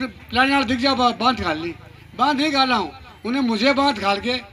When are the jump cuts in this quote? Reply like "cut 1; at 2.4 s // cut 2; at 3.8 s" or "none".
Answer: none